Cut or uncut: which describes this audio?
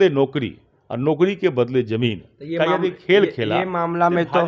uncut